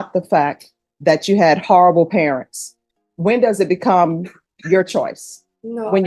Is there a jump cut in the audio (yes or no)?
no